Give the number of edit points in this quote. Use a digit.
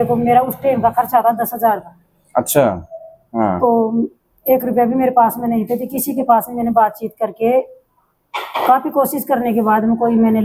0